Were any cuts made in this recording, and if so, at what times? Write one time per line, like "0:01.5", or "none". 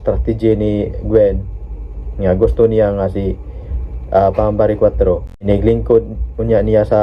0:05.4